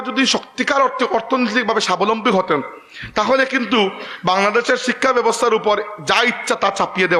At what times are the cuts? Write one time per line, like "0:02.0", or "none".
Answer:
none

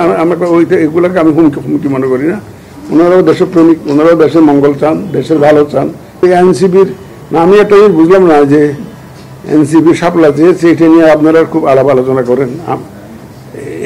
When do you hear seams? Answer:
0:06.2

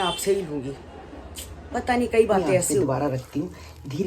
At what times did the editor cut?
0:02.8

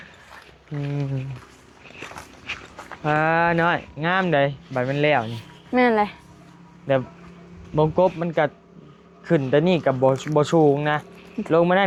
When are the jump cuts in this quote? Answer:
none

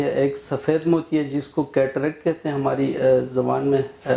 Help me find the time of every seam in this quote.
none

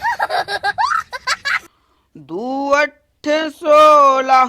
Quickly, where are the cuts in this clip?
0:02.1

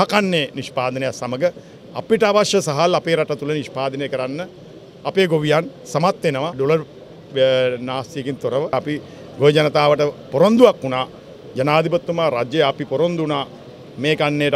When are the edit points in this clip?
0:06.5
0:08.7

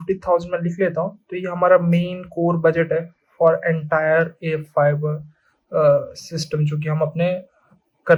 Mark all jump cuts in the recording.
none

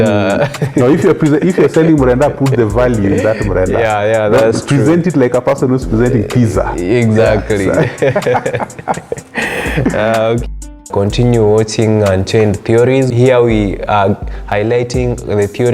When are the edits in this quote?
0:10.8
0:13.1

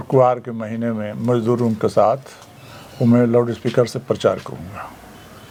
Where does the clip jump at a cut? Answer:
none

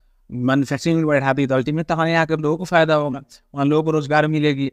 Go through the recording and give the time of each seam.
none

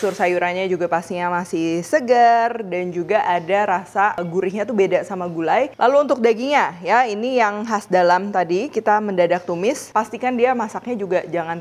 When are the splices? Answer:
0:04.2
0:05.7
0:09.8

